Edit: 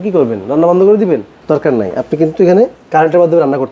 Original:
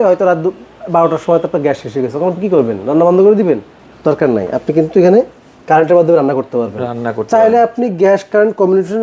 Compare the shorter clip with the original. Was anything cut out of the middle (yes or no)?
yes